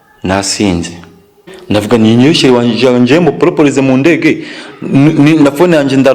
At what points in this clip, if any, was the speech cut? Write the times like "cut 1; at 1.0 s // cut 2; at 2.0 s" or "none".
cut 1; at 1.5 s